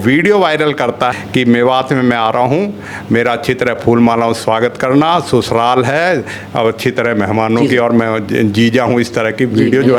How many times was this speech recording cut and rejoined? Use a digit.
1